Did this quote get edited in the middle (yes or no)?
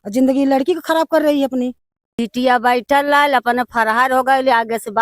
yes